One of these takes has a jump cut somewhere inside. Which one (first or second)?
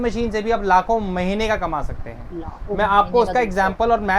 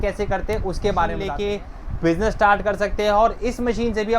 second